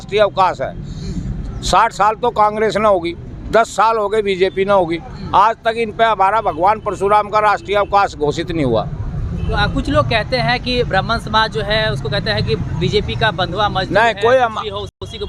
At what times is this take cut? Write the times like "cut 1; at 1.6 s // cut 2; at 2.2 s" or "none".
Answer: none